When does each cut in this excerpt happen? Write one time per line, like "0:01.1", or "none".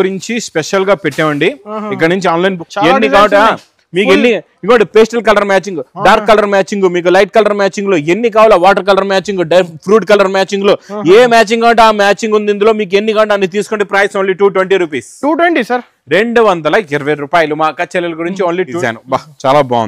0:02.7
0:18.7

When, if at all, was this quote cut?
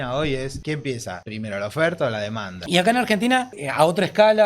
0:01.0
0:02.5
0:03.6

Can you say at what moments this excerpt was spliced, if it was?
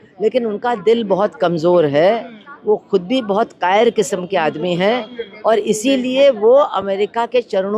none

